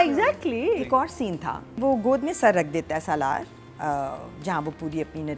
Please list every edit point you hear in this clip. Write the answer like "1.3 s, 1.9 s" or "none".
1.7 s